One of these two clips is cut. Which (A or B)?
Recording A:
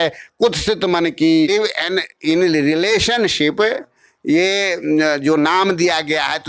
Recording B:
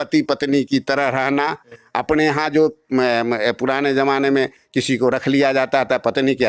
A